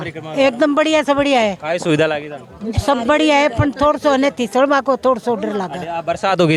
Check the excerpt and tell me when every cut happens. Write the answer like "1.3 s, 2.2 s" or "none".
none